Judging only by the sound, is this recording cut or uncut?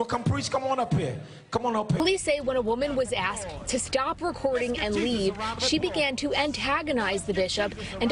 cut